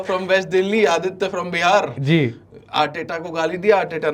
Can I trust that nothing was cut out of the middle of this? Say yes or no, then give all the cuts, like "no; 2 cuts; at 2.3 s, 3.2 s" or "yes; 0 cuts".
yes; 0 cuts